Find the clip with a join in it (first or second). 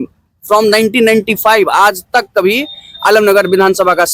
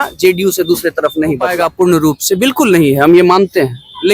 second